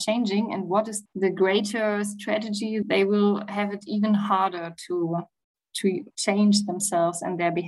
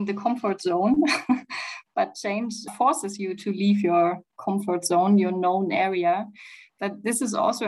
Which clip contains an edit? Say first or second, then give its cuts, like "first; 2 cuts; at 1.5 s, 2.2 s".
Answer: first; 1 cut; at 2.8 s